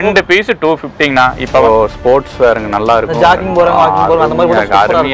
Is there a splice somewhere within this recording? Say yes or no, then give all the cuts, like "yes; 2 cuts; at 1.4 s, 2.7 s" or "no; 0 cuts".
yes; 1 cut; at 1.6 s